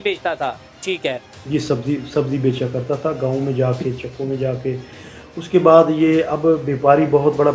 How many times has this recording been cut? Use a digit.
0